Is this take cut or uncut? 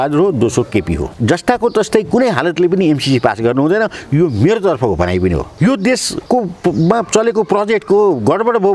cut